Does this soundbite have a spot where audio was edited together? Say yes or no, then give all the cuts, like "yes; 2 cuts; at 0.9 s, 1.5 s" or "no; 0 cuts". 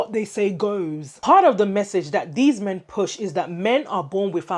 no; 0 cuts